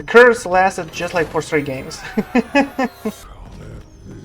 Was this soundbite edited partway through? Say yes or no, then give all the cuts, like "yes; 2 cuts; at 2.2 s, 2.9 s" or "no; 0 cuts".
yes; 1 cut; at 3.3 s